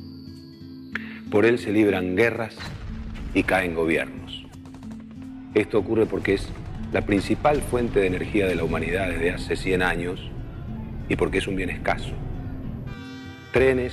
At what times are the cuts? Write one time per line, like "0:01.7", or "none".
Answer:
0:10.0